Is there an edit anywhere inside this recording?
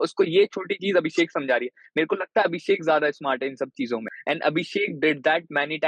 yes; 1 cut; at 4.1 s

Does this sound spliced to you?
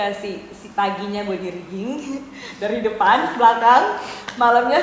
no; 0 cuts

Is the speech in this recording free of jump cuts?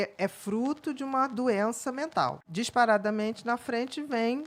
no; 1 cut; at 2.4 s

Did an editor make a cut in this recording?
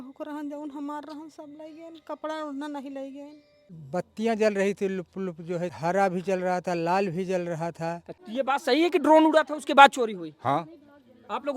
yes; 3 cuts; at 3.7 s, 5.7 s, 8.1 s

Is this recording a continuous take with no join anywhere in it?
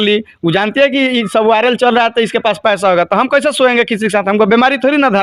yes; 0 cuts

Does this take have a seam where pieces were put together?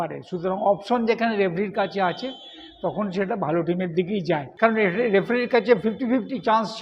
yes; 1 cut; at 4.5 s

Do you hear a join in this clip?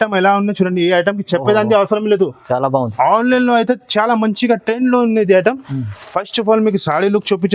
no; 0 cuts

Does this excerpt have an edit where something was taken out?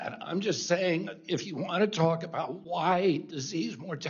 yes; 1 cut; at 2.6 s

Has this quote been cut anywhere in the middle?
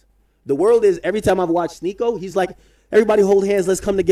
no; 0 cuts

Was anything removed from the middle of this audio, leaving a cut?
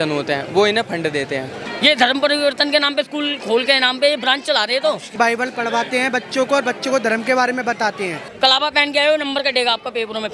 yes; 3 cuts; at 1.6 s, 5.1 s, 8.2 s

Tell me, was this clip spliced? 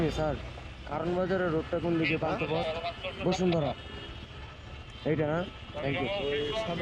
no; 0 cuts

